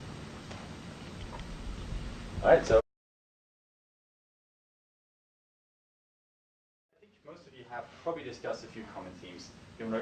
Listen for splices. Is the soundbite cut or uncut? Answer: uncut